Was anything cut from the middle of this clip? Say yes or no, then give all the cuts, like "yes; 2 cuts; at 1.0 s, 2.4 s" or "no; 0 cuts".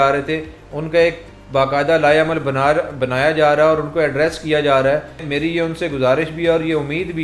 no; 0 cuts